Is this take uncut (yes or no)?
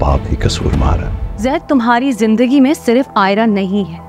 no